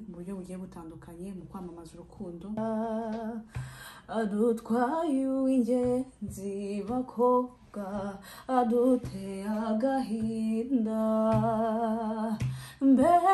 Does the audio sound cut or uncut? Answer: cut